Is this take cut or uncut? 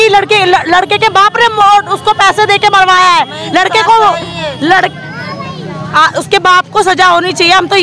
uncut